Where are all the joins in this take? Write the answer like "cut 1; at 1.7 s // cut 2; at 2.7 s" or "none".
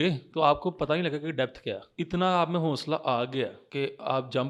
cut 1; at 1.9 s // cut 2; at 3.6 s